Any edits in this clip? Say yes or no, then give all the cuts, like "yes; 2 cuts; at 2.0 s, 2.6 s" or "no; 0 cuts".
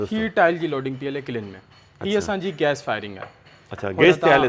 no; 0 cuts